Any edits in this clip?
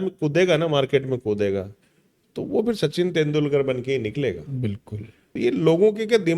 yes; 1 cut; at 5.2 s

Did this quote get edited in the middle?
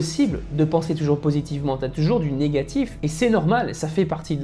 no; 0 cuts

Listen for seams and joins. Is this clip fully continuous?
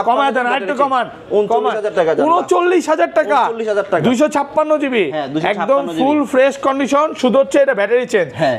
yes; 0 cuts

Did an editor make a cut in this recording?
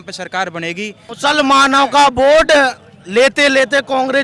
yes; 1 cut; at 1.1 s

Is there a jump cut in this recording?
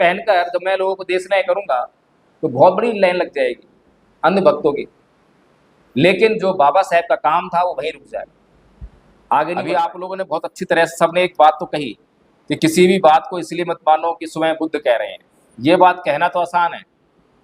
yes; 1 cut; at 10.0 s

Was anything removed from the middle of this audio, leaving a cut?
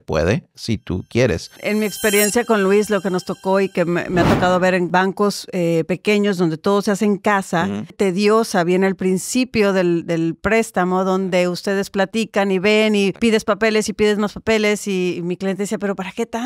yes; 4 cuts; at 1.6 s, 4.9 s, 7.9 s, 13.1 s

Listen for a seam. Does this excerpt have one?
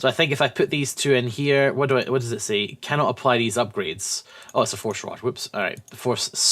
yes; 1 cut; at 5.1 s

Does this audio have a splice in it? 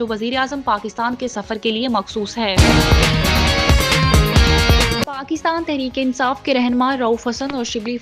yes; 2 cuts; at 2.5 s, 5.1 s

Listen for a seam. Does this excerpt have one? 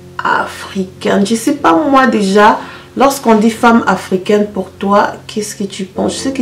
no; 0 cuts

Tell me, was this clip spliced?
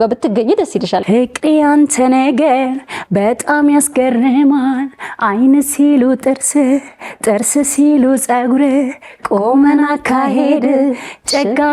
yes; 1 cut; at 1.0 s

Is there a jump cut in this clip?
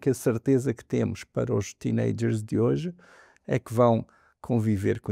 no; 0 cuts

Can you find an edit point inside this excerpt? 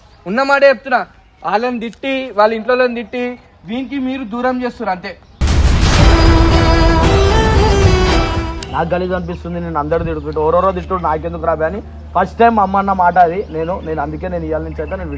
yes; 1 cut; at 8.4 s

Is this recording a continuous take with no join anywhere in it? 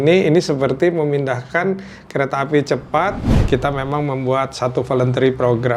no; 1 cut; at 3.3 s

